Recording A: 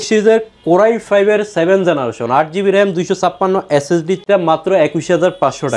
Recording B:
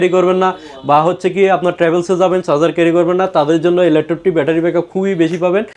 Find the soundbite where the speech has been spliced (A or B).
A